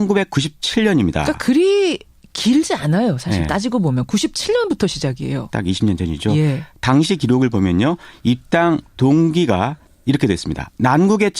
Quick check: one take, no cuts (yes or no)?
no